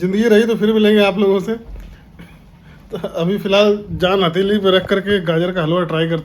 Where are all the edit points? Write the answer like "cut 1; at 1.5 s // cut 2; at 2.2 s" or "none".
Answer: none